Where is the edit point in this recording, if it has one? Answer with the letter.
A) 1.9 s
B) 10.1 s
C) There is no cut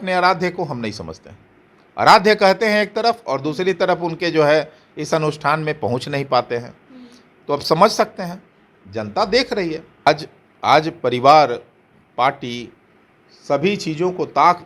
B